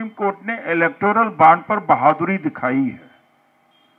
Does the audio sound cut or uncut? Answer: uncut